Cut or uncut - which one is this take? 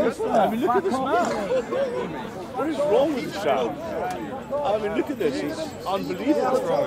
uncut